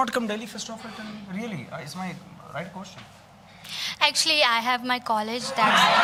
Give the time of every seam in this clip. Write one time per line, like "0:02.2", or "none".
none